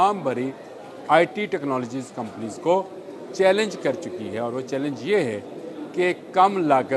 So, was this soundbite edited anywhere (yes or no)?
no